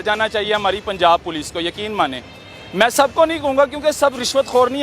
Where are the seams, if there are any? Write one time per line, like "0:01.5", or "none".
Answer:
none